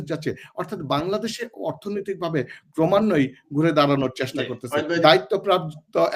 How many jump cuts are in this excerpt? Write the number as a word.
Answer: one